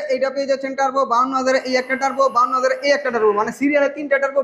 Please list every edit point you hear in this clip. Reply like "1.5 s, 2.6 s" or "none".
none